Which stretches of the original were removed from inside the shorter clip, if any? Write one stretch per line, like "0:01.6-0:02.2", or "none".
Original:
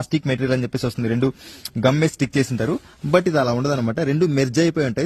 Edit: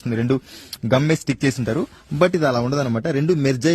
none